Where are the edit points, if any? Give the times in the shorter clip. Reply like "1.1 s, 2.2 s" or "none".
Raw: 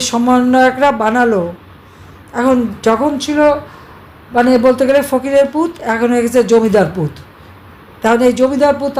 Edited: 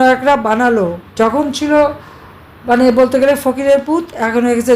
1.1 s